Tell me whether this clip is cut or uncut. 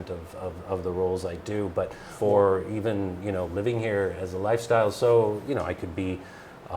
cut